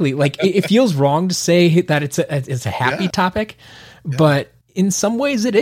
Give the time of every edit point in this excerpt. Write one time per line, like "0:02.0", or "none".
0:03.1

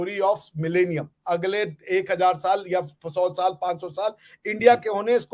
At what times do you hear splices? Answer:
none

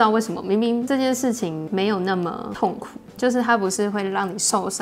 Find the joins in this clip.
none

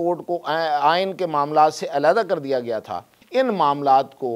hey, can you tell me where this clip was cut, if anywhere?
0:03.1

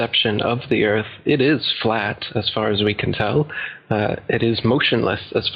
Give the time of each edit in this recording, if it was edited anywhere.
0:01.1

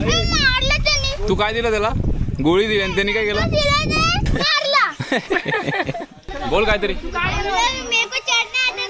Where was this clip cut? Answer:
0:04.2
0:06.1

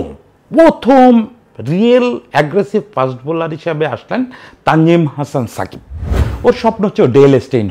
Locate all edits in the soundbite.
0:06.2

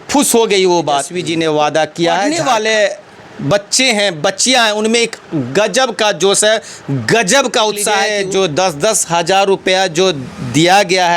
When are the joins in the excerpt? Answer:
0:01.2
0:02.3
0:08.1

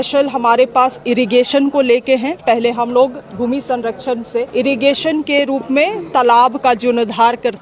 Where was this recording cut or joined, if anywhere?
0:04.5

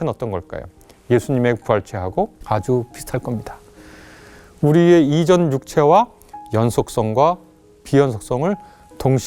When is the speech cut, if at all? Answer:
0:02.4

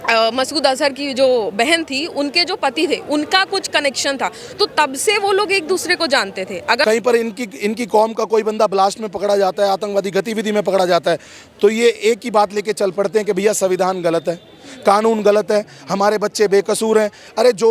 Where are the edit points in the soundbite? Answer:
0:06.8

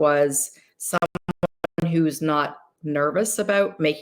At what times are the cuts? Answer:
none

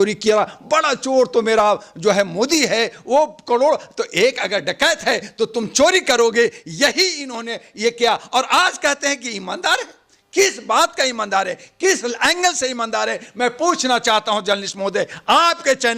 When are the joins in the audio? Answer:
none

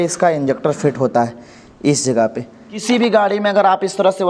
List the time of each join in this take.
0:02.8

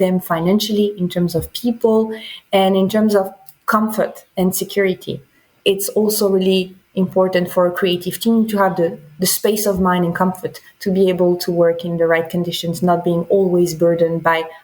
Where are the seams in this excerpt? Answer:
0:05.5

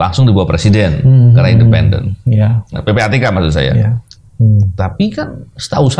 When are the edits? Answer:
0:04.0

